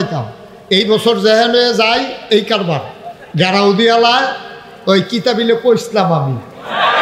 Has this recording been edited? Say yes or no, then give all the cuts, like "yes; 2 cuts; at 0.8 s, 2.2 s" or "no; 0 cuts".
no; 0 cuts